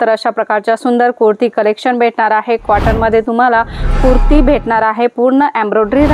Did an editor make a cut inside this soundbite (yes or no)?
yes